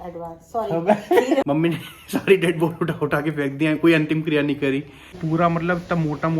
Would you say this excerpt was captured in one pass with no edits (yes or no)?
no